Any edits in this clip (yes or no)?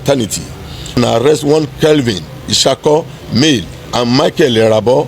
yes